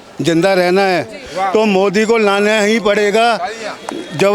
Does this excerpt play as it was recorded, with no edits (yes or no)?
no